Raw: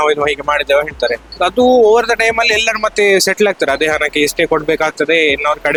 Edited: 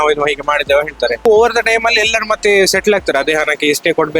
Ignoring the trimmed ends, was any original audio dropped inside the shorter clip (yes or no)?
yes